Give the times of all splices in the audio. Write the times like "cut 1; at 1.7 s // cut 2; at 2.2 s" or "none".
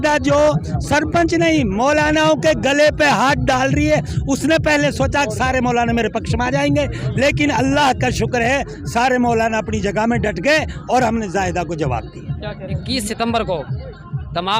cut 1; at 12.8 s